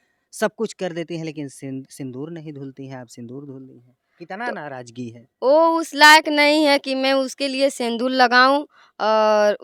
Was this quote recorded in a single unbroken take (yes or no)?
yes